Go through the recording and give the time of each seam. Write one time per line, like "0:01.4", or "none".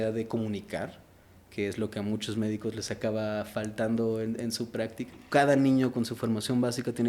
0:05.2